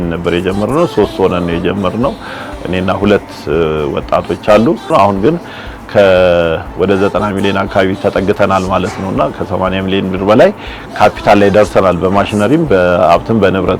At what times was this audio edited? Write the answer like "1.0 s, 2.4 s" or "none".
4.9 s